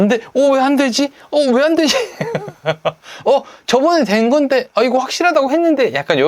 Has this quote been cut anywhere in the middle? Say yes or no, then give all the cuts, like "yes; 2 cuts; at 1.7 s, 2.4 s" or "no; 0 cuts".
no; 0 cuts